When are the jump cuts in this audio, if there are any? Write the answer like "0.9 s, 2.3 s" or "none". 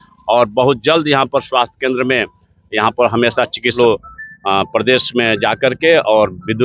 3.8 s